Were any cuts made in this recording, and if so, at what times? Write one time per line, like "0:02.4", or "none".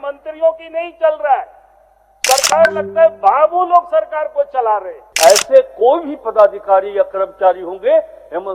0:05.0